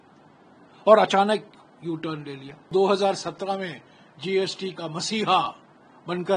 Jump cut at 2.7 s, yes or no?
yes